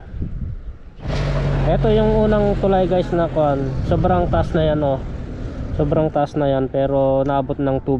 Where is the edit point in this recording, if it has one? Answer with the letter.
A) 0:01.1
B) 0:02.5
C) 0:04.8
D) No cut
A